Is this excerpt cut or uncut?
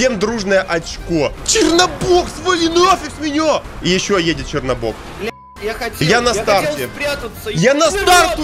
cut